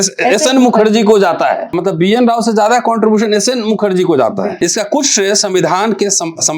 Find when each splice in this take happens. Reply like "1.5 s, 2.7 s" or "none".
1.8 s, 4.6 s